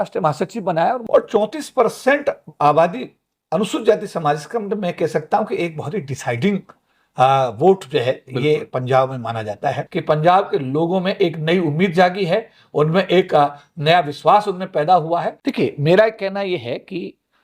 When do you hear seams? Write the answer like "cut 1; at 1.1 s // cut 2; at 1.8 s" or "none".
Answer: cut 1; at 1.0 s // cut 2; at 9.9 s // cut 3; at 15.4 s